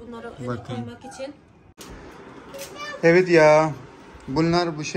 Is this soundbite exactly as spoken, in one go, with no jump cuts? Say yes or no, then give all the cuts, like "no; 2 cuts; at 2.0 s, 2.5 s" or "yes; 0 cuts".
no; 1 cut; at 1.8 s